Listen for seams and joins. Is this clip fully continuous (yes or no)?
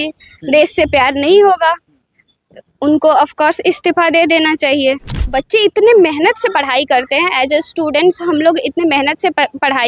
no